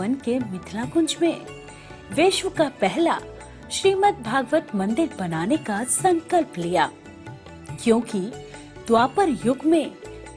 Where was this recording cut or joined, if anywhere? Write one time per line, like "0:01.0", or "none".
none